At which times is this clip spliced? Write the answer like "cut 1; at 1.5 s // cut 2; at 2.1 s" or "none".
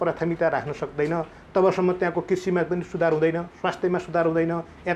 none